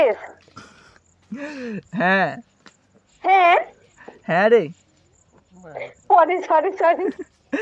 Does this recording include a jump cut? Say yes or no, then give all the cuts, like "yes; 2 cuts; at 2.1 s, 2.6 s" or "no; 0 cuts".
no; 0 cuts